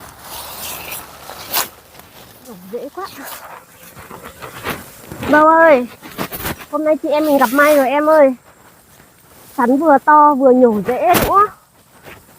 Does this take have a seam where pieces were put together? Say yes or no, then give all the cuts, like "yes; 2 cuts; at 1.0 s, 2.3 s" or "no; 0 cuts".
yes; 1 cut; at 2.6 s